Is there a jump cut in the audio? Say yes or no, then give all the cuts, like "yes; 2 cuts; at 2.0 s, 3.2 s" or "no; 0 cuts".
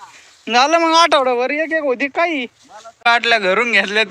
yes; 1 cut; at 3.1 s